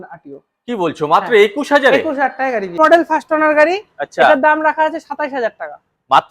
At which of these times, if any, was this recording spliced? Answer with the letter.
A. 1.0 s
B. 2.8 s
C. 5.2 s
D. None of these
B